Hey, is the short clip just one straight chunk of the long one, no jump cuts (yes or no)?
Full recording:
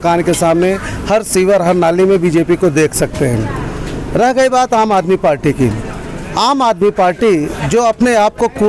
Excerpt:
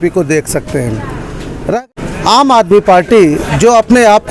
no